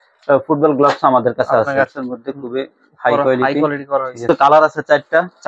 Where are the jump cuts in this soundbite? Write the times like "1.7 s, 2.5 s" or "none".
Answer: 2.0 s, 4.3 s